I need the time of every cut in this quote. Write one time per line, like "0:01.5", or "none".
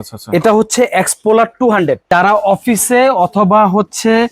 0:02.0